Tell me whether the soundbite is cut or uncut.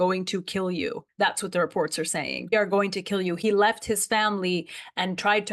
uncut